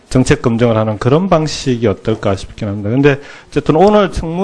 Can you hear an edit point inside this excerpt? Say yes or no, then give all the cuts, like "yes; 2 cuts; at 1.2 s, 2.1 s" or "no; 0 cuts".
yes; 1 cut; at 1.2 s